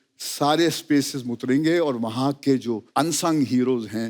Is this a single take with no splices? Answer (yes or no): no